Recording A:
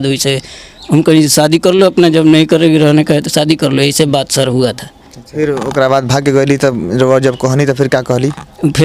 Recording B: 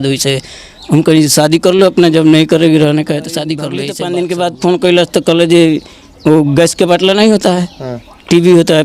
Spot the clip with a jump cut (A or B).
B